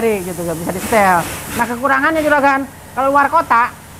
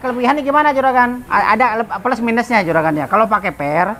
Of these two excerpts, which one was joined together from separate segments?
second; 1 cut; at 1.2 s

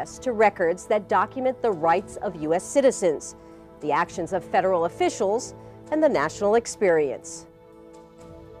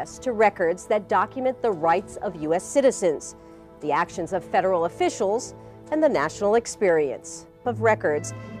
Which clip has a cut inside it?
first; 1 cut; at 7.6 s

